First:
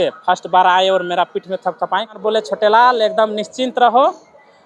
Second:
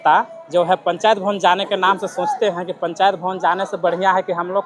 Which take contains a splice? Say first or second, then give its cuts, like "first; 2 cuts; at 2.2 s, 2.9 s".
first; 1 cut; at 2.2 s